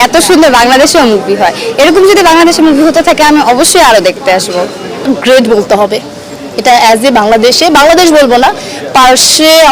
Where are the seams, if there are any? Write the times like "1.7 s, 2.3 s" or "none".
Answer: 5.1 s